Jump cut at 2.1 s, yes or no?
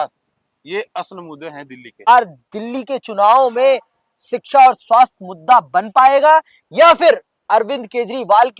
yes